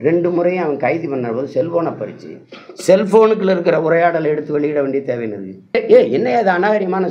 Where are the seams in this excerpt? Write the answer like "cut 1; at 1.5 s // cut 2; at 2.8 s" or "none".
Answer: cut 1; at 5.8 s

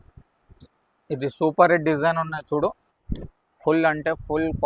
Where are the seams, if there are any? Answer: cut 1; at 2.9 s

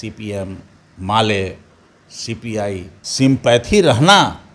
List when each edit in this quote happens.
cut 1; at 3.0 s

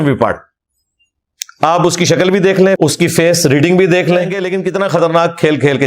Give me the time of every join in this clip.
cut 1; at 4.5 s

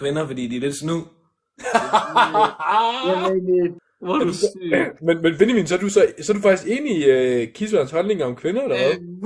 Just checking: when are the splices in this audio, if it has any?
cut 1; at 3.8 s

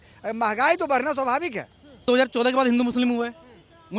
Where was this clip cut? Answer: cut 1; at 2.0 s

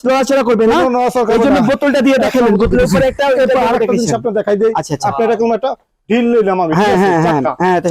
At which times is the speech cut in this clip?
none

